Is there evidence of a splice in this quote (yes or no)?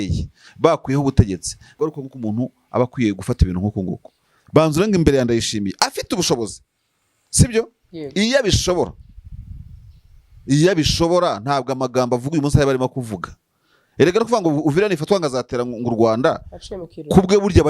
yes